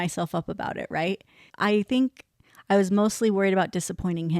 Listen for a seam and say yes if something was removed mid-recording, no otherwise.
yes